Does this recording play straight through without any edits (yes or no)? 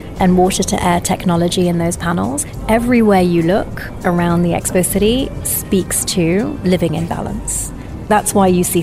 yes